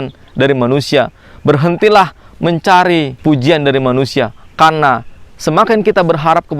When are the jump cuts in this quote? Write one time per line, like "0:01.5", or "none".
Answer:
0:03.1